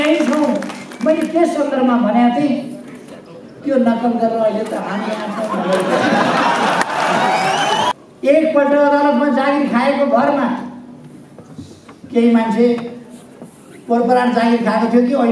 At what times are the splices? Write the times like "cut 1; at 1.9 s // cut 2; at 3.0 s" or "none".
cut 1; at 7.9 s